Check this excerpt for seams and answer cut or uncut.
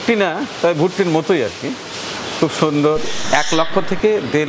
cut